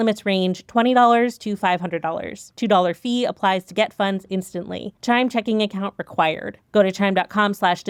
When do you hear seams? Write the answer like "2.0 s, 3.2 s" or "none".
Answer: none